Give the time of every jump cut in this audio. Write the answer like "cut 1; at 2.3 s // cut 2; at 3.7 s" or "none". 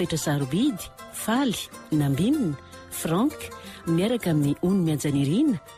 none